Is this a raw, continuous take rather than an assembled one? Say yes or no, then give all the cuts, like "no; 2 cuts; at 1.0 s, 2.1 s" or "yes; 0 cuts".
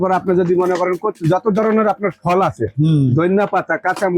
yes; 0 cuts